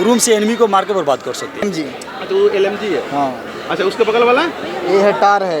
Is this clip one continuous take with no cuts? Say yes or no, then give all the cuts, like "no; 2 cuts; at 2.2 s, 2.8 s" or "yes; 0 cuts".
no; 1 cut; at 1.7 s